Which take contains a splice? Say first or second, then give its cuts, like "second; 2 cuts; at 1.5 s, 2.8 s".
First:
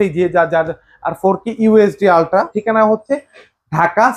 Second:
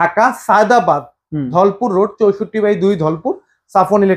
first; 1 cut; at 2.5 s